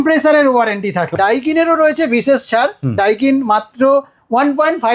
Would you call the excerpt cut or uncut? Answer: cut